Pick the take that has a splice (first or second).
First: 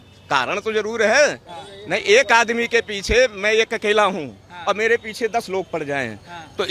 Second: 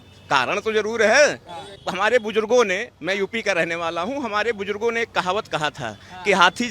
second